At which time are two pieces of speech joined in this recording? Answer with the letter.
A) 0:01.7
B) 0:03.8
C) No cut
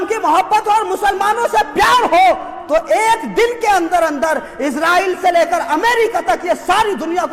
C